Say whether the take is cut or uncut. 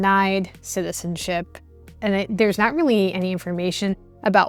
uncut